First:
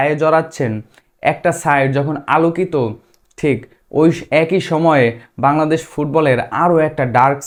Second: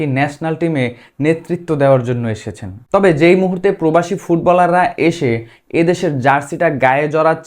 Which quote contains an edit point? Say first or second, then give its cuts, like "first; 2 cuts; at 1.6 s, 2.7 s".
second; 1 cut; at 2.7 s